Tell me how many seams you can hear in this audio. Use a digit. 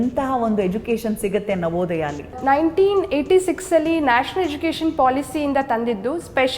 1